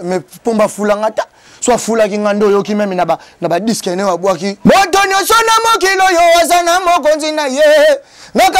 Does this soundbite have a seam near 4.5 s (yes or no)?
yes